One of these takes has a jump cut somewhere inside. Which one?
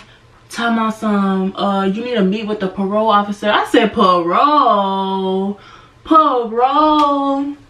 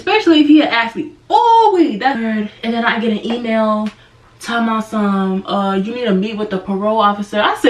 second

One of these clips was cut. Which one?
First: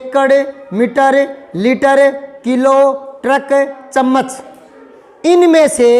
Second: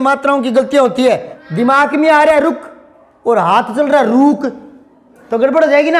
second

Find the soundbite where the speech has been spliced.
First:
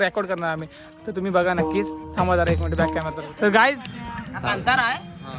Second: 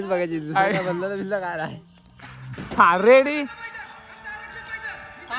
first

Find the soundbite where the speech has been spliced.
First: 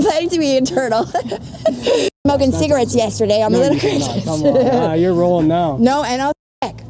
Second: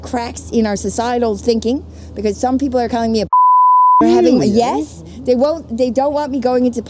first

